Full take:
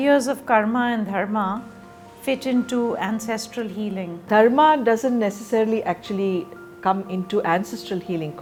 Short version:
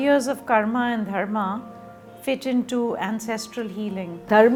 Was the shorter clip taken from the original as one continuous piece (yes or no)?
yes